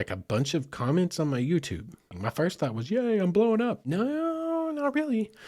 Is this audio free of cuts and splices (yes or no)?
no